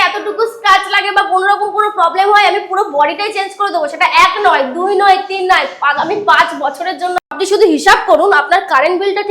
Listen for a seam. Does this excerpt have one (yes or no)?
yes